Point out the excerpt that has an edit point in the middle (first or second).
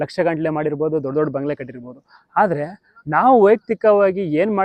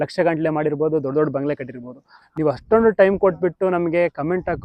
second